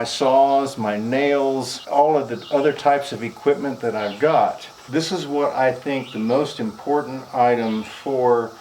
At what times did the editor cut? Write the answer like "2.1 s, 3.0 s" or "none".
1.8 s, 4.8 s